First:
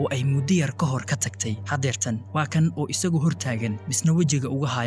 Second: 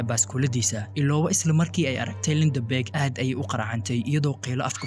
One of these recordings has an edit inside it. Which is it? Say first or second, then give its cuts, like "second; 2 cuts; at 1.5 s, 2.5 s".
first; 1 cut; at 1.6 s